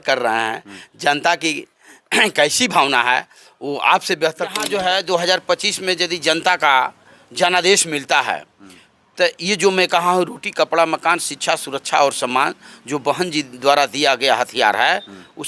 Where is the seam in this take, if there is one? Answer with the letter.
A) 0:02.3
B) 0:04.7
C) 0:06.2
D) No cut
B